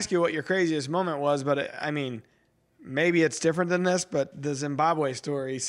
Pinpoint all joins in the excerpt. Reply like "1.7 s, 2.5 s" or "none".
none